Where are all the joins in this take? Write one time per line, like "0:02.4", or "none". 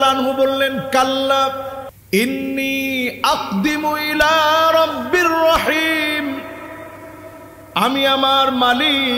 0:01.9